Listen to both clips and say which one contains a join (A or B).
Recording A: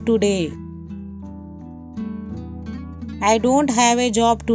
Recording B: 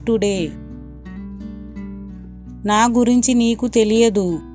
A